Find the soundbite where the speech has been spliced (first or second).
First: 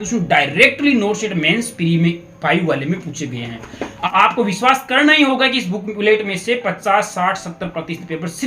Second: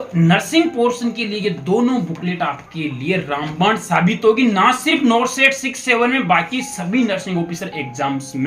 first